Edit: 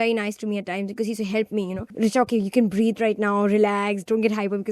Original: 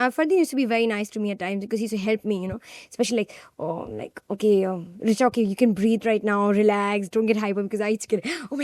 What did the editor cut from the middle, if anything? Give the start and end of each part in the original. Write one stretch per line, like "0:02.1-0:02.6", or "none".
0:02.6-0:04.9